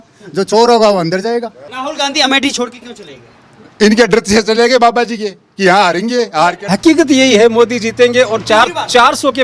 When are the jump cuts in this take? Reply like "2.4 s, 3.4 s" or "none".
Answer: 1.7 s, 6.6 s